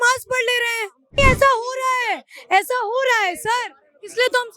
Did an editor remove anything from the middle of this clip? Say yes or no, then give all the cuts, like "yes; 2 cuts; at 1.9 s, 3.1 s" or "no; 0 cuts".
yes; 1 cut; at 1.2 s